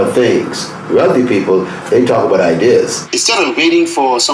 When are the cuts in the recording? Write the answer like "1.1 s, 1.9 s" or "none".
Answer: 3.0 s